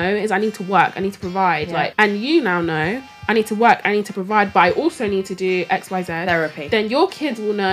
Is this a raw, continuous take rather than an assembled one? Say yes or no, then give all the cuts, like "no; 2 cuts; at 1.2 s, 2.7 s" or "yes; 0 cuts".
no; 1 cut; at 1.9 s